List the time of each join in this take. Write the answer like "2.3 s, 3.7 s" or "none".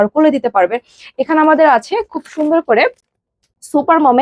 none